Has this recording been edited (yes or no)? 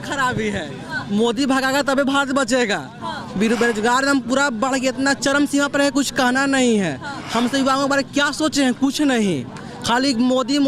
no